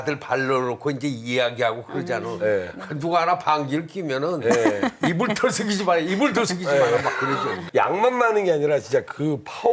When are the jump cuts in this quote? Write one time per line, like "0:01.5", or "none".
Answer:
0:07.6